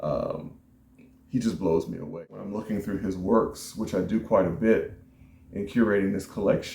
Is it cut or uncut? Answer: cut